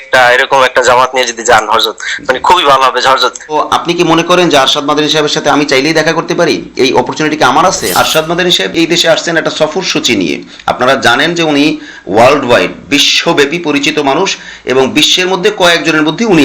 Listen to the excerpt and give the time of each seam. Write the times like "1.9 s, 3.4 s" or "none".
3.6 s, 7.9 s